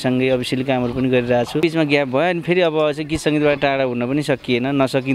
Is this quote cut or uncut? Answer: cut